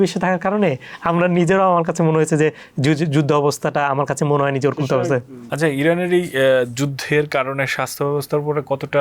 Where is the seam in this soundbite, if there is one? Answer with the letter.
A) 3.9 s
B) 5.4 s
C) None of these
B